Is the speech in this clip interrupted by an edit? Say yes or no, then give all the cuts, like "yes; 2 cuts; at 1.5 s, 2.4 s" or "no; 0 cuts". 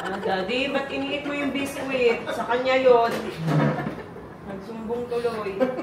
no; 0 cuts